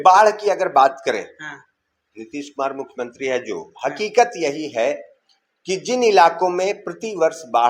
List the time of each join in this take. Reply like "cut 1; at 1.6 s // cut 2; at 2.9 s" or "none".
none